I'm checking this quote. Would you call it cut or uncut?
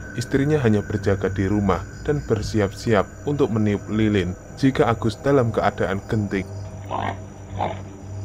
uncut